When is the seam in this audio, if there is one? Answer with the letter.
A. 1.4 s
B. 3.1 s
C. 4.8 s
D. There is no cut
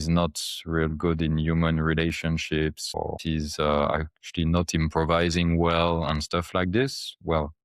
B